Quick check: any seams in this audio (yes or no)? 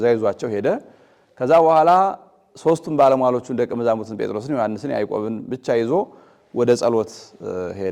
no